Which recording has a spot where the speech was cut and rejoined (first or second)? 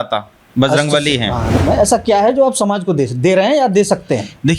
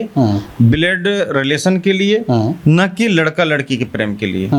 first